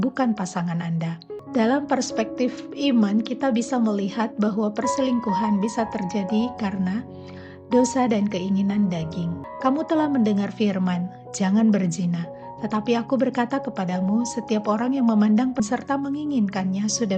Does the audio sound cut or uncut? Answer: cut